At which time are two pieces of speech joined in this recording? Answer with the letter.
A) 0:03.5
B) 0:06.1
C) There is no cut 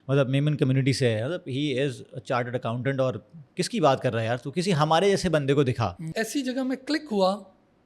B